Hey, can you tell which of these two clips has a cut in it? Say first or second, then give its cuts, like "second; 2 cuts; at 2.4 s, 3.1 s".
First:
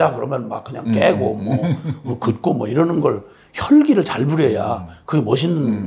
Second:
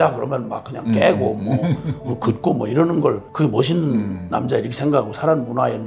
second; 1 cut; at 3.3 s